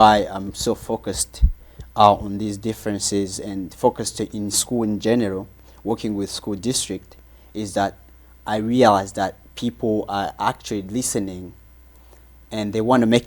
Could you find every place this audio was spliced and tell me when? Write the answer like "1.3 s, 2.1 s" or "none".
none